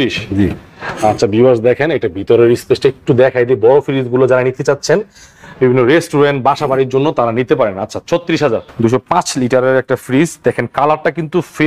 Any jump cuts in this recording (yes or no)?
yes